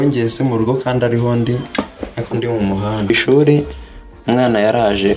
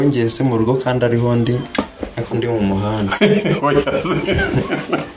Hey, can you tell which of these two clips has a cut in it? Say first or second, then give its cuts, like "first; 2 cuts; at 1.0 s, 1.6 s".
first; 1 cut; at 3.1 s